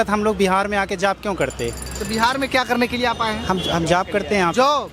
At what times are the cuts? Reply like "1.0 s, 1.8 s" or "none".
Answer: none